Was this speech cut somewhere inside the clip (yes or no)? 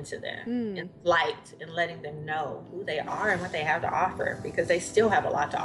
no